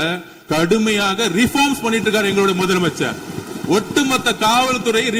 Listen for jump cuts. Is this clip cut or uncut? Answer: uncut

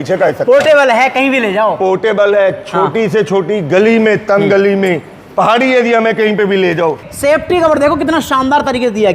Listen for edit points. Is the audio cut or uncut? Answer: cut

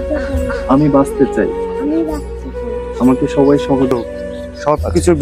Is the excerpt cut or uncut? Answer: cut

